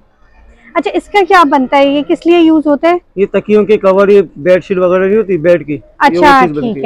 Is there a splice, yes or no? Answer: no